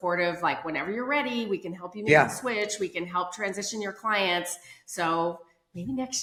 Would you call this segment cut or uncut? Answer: uncut